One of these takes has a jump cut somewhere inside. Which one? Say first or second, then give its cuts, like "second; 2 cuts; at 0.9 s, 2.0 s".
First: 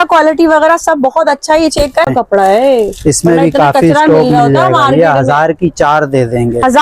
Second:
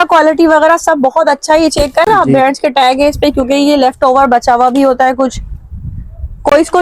first; 1 cut; at 2.1 s